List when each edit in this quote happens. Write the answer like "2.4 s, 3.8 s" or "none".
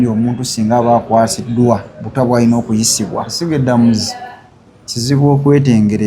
3.3 s